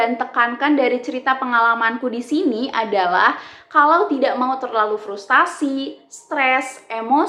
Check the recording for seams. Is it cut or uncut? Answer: uncut